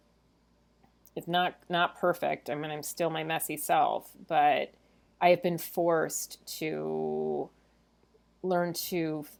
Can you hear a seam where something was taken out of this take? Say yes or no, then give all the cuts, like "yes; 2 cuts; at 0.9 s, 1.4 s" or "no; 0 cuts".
no; 0 cuts